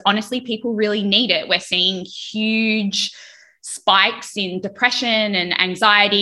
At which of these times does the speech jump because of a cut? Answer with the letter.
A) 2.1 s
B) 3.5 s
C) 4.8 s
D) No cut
D